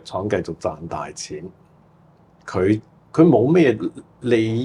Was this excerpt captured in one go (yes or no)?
yes